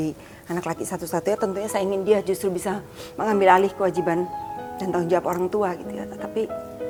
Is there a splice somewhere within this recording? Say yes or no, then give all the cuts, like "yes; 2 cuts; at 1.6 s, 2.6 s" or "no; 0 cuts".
no; 0 cuts